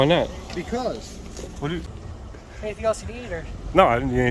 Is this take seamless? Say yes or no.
no